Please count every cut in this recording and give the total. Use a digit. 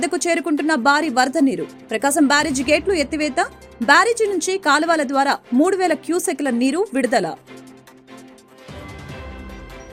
0